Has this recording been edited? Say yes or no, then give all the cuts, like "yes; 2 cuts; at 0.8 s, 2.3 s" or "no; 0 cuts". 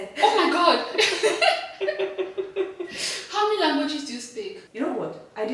yes; 1 cut; at 4.6 s